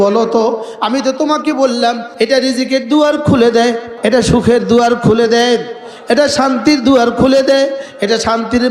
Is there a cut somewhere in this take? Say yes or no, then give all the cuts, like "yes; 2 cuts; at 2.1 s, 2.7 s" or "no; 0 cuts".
yes; 2 cuts; at 2.1 s, 3.9 s